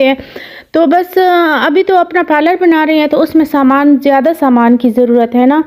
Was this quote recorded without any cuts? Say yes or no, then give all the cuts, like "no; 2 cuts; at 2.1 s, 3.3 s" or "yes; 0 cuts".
yes; 0 cuts